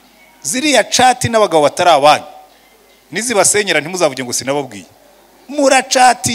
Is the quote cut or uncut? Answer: uncut